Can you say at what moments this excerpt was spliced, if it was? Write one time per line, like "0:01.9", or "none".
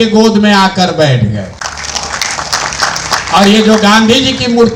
none